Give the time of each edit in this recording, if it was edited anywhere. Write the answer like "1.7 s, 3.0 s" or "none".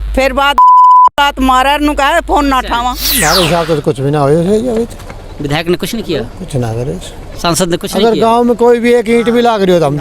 3.1 s